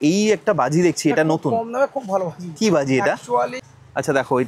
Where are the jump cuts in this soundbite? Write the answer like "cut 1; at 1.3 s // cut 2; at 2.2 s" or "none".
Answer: cut 1; at 3.6 s